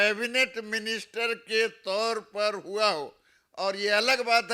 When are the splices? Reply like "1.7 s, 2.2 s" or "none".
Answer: none